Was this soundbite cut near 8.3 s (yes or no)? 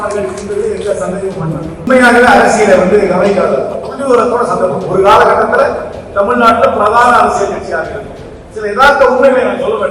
no